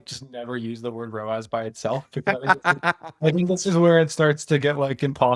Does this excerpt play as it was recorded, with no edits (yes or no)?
yes